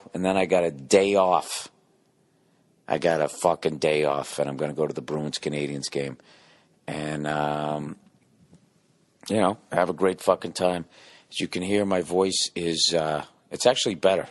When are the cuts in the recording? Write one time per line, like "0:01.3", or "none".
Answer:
none